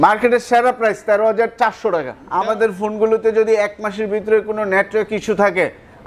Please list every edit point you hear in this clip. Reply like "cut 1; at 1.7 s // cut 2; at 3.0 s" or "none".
cut 1; at 2.1 s